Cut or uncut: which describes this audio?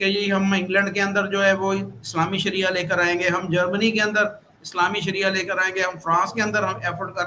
uncut